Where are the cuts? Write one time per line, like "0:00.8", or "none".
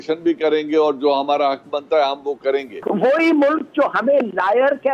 0:02.7